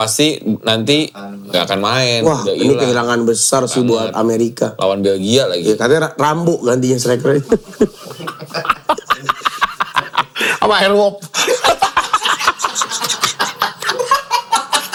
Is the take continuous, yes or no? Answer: yes